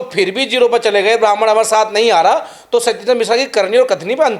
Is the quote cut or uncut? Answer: uncut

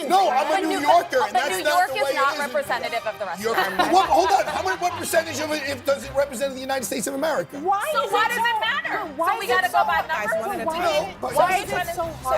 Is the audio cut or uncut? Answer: cut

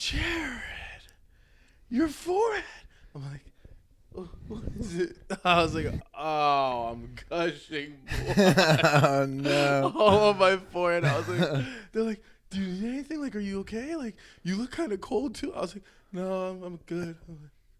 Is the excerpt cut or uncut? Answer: uncut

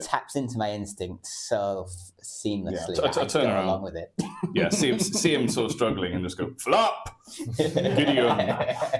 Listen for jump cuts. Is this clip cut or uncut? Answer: uncut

